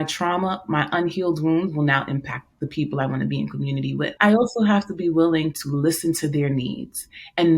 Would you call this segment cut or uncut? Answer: cut